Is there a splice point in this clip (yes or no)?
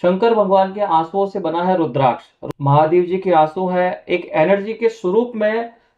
yes